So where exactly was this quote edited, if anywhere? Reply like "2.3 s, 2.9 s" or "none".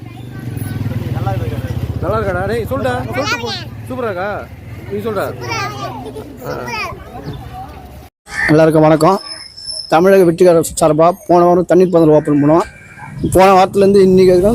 8.2 s